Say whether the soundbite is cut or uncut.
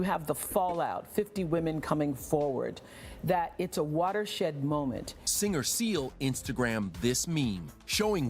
cut